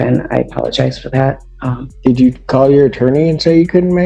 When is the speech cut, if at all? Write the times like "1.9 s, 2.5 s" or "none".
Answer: 1.9 s